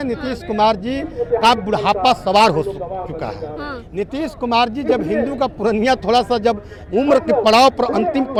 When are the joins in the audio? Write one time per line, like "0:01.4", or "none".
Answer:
none